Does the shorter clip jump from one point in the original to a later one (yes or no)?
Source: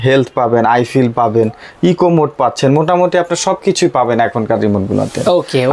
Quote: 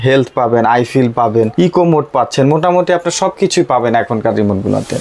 yes